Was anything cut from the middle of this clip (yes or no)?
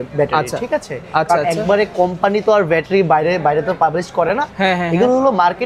no